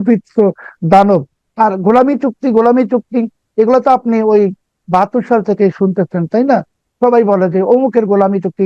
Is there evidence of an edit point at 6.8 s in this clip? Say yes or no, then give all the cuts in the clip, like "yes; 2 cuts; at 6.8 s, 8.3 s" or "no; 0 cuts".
no; 1 cut; at 1.4 s